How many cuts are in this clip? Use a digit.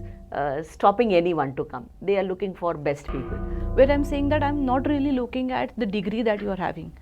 1